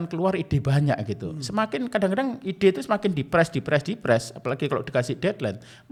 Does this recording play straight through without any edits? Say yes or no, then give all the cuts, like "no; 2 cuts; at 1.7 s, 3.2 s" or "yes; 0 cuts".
yes; 0 cuts